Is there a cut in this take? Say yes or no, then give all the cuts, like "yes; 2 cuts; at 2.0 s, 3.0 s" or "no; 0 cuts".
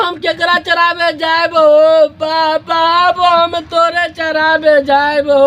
no; 0 cuts